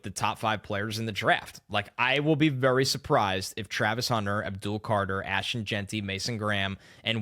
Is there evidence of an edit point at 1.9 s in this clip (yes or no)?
no